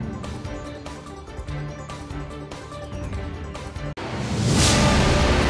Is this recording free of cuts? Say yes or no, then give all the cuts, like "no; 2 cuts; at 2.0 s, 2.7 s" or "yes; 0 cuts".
no; 1 cut; at 2.3 s